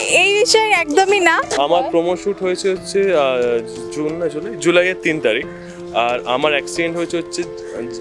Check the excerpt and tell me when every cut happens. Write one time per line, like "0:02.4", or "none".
0:01.5